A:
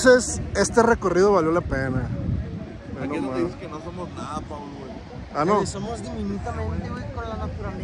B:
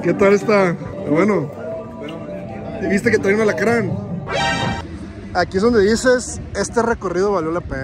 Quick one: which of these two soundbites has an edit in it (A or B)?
B